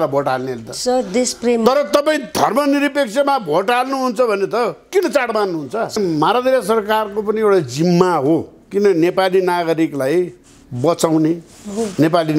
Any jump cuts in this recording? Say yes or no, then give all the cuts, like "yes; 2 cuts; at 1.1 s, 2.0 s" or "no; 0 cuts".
yes; 1 cut; at 6.0 s